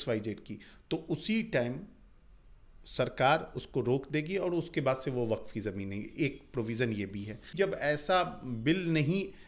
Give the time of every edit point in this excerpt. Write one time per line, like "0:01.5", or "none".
0:07.5